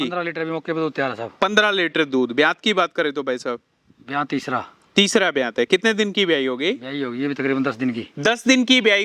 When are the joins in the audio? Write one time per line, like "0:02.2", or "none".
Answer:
none